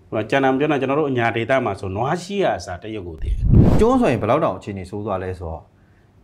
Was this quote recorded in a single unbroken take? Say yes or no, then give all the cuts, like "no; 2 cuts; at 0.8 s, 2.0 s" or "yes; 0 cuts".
no; 1 cut; at 3.4 s